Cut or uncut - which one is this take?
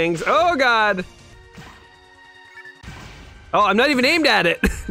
cut